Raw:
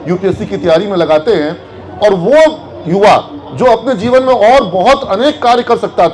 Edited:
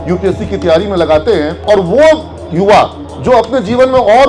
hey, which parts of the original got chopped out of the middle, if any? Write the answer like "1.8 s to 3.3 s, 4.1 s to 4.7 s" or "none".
1.5 s to 1.9 s